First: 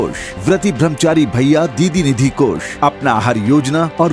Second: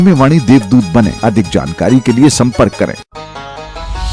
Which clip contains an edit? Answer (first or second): second